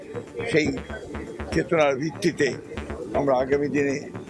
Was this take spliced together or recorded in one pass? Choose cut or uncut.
uncut